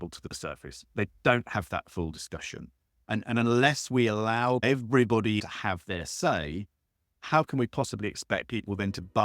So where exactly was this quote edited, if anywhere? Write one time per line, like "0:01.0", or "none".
0:04.6
0:05.4